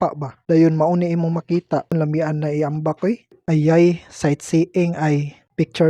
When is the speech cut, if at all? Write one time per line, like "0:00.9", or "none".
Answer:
0:01.9
0:03.4